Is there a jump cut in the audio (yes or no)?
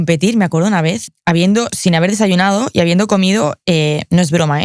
no